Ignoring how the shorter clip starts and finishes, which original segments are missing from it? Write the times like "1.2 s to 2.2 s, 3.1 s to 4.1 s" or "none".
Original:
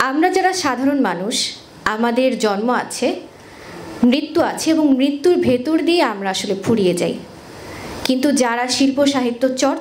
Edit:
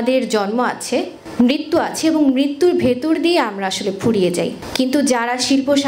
3.3 s to 3.8 s, 7.2 s to 7.9 s

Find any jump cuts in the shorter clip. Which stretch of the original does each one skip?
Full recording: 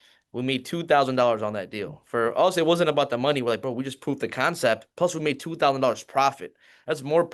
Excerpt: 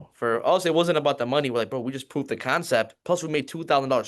none

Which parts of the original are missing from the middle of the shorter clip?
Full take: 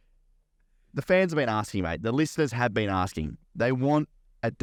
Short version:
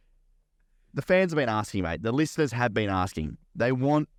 none

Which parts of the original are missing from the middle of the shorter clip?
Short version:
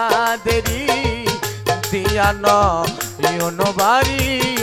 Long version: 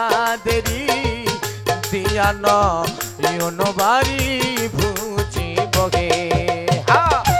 none

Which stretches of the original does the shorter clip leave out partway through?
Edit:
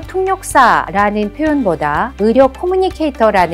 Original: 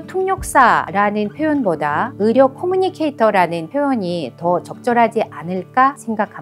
none

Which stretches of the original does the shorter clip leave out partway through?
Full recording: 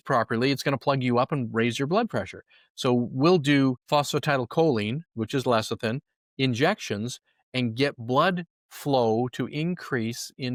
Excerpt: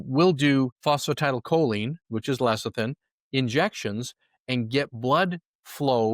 none

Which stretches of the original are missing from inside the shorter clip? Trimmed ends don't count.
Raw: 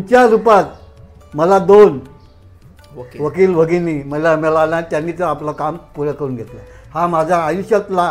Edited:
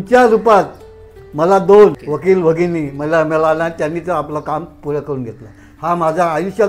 2.0 s to 3.1 s

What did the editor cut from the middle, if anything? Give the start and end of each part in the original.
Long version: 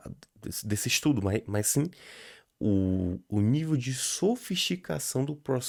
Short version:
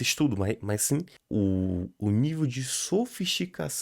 2.0 s to 2.5 s

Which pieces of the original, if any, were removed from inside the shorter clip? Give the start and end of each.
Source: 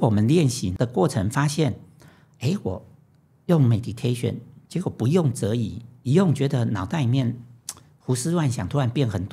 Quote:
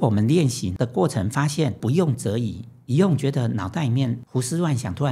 1.8 s to 4.9 s, 7.4 s to 8.0 s

